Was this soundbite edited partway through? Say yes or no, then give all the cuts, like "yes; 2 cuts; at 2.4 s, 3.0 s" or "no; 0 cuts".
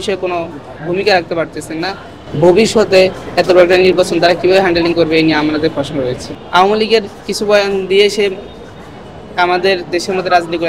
no; 0 cuts